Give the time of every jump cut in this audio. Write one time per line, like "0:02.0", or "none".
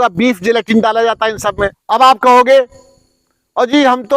0:01.8